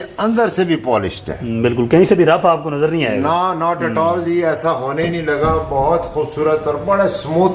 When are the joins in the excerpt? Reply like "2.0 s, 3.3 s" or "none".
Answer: none